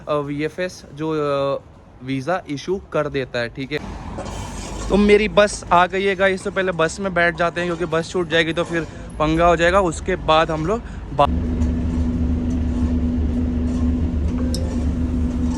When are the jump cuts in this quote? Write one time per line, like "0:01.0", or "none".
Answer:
0:03.8
0:11.3